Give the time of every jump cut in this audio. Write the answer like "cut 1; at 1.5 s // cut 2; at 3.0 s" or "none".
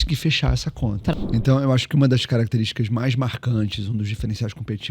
cut 1; at 1.1 s